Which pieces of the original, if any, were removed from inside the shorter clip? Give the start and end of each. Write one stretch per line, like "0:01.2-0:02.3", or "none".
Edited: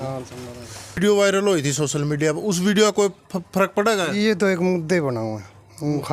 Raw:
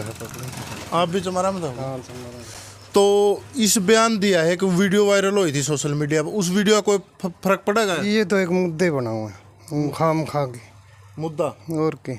0:02.8-0:04.9